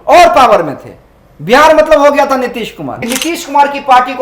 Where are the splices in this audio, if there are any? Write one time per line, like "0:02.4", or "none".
0:02.9

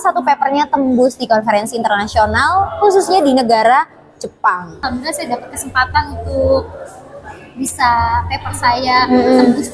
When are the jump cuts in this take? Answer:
0:04.8

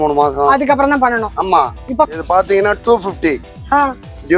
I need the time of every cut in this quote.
0:02.1

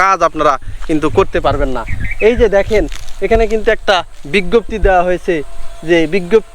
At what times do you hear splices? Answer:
none

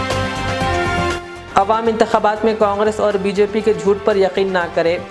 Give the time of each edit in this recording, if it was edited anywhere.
0:01.1

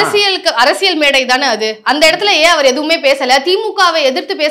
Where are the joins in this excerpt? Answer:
none

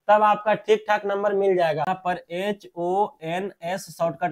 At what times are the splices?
0:01.9

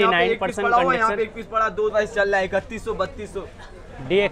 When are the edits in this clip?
0:01.9

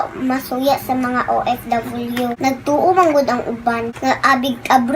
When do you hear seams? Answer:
0:02.4

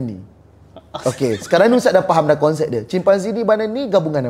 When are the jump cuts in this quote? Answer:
none

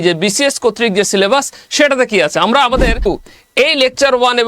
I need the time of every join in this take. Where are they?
0:03.1

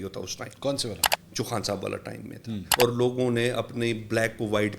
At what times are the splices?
0:02.6

